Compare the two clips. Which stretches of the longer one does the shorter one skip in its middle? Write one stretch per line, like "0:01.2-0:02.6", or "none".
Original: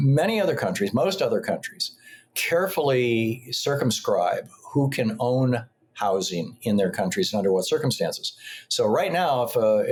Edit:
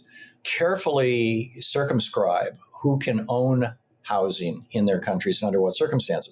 none